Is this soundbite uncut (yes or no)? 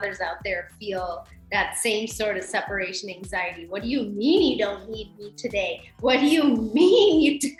yes